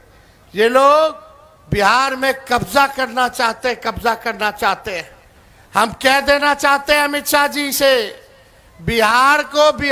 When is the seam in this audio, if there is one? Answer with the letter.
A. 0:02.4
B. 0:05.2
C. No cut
C